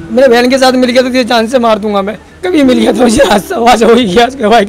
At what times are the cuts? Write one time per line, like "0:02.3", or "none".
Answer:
none